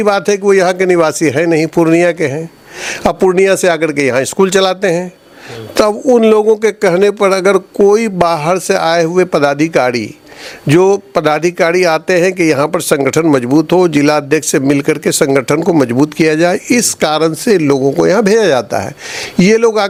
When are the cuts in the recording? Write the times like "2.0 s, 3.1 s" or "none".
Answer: none